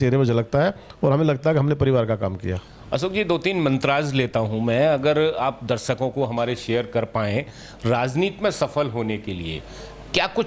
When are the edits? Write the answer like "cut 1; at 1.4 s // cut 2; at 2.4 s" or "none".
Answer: none